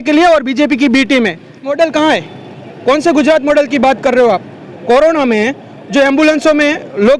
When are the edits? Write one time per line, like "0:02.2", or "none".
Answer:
0:01.7